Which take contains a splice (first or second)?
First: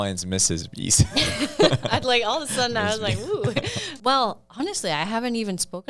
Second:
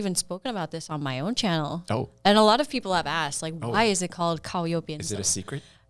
first